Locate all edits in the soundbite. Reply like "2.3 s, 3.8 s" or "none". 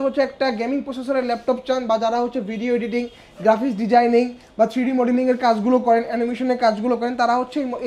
none